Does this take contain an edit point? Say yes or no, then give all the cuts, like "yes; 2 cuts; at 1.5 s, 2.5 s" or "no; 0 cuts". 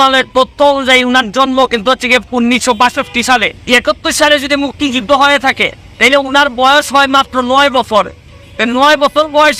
yes; 1 cut; at 3.6 s